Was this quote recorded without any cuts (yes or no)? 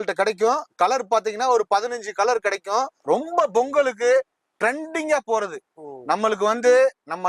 no